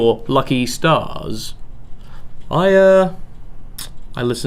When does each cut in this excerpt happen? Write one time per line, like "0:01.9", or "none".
0:02.8